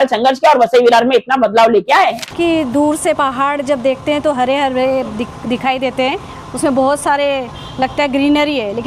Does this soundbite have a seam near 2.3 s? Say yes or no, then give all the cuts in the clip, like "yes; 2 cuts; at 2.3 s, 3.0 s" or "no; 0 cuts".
yes; 1 cut; at 2.3 s